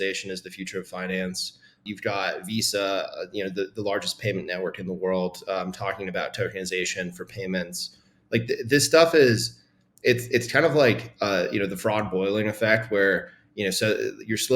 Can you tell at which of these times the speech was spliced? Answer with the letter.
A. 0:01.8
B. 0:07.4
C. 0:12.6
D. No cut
A